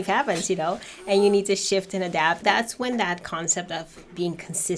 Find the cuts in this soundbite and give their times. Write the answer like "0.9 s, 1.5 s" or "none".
2.4 s